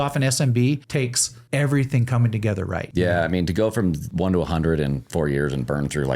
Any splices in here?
yes; 3 cuts; at 1.0 s, 2.8 s, 4.1 s

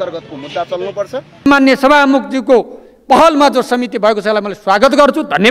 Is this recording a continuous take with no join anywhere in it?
no; 1 cut; at 1.5 s

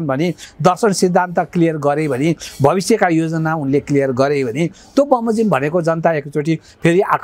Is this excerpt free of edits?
yes; 0 cuts

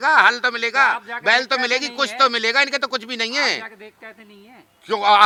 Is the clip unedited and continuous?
yes; 0 cuts

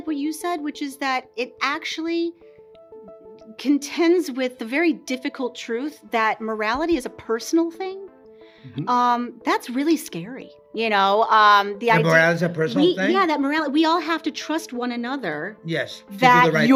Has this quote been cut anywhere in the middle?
no; 0 cuts

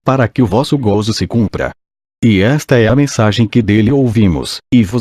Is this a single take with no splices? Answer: no; 1 cut; at 3.5 s

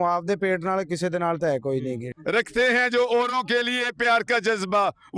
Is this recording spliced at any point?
yes; 1 cut; at 2.1 s

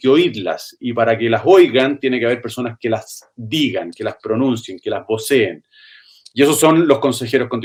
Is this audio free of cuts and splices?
yes; 0 cuts

